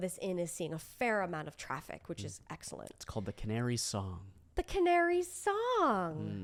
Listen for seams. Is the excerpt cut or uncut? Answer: uncut